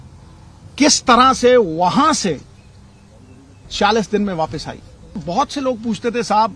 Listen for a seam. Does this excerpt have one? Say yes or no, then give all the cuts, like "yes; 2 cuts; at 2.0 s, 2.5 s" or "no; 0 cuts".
yes; 1 cut; at 5.2 s